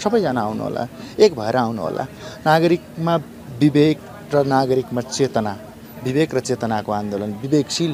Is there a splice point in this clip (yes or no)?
no